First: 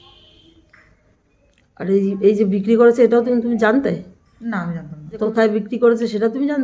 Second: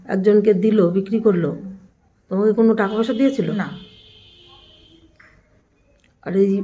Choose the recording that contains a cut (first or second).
first